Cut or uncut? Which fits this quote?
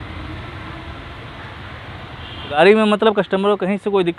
cut